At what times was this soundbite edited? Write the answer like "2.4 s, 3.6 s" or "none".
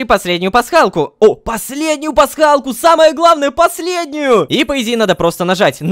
4.5 s